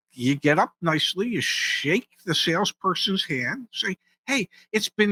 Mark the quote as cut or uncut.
uncut